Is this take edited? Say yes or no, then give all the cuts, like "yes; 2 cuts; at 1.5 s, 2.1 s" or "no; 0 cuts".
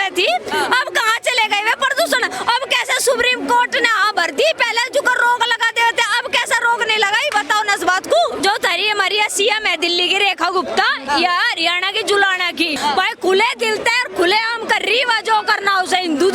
yes; 2 cuts; at 8.4 s, 12.8 s